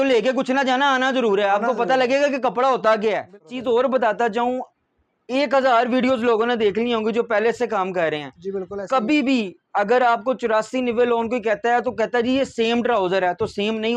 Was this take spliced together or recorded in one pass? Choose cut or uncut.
cut